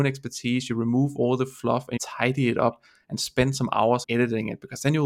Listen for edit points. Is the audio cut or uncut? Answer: cut